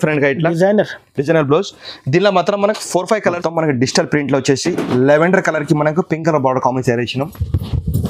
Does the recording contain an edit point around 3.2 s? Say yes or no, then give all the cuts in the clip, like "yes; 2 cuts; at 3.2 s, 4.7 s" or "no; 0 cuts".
yes; 1 cut; at 3.2 s